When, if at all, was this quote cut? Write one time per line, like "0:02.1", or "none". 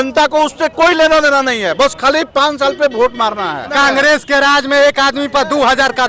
0:03.7